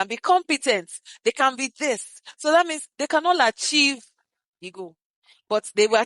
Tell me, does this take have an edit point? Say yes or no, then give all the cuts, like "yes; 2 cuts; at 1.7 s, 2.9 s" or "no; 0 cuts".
no; 0 cuts